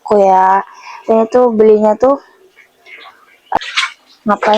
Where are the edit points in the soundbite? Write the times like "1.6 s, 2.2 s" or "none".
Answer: 3.6 s